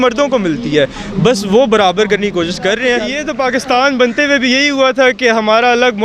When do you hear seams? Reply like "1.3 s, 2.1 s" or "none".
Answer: 3.2 s